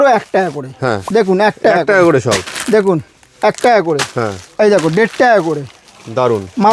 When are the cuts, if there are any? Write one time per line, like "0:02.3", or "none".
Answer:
0:01.0

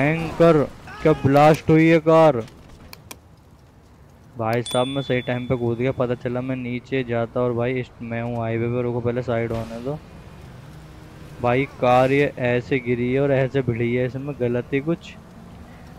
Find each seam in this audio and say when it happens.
none

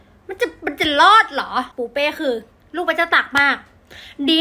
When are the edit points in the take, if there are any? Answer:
0:01.7

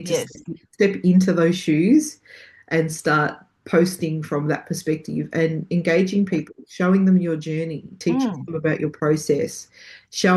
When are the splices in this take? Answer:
none

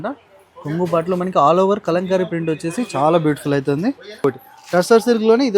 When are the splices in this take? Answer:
0:04.2

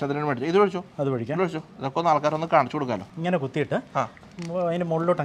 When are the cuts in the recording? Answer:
0:03.1

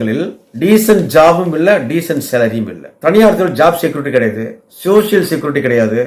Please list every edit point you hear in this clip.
0:02.8

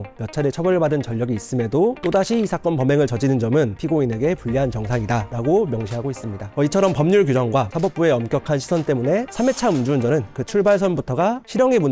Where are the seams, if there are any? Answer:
none

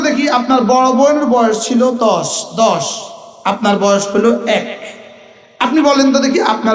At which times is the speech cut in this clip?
none

